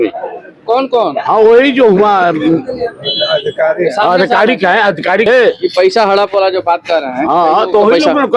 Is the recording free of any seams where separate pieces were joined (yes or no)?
yes